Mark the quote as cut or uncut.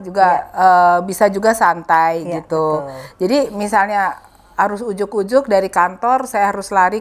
uncut